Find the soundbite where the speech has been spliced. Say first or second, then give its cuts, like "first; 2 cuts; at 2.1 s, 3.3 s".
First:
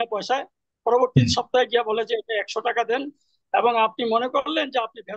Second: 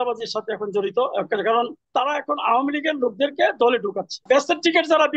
second; 2 cuts; at 1.8 s, 4.2 s